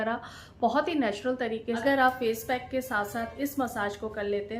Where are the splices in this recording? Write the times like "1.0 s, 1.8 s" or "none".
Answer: 1.8 s